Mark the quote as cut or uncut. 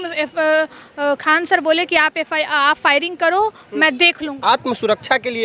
cut